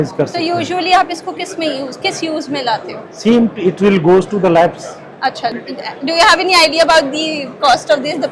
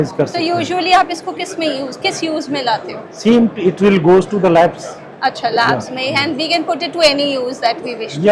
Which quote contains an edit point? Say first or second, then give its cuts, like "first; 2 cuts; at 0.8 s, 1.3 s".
first; 1 cut; at 5.5 s